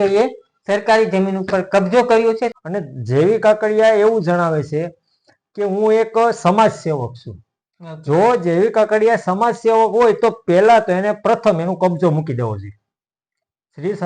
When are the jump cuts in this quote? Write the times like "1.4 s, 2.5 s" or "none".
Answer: 2.5 s